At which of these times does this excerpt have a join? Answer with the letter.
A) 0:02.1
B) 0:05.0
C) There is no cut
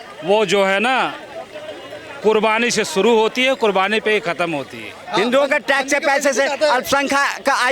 B